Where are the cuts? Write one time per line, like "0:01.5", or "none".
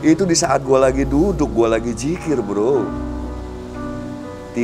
none